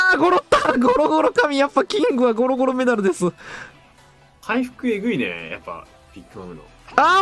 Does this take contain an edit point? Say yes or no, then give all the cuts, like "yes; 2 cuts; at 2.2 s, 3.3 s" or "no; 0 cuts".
no; 0 cuts